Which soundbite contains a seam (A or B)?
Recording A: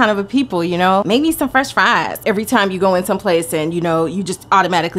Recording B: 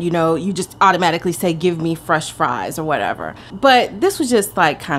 A